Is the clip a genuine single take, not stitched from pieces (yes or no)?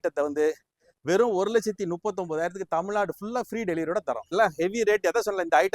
no